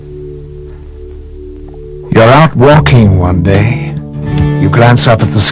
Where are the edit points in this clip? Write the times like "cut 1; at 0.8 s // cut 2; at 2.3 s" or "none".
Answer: none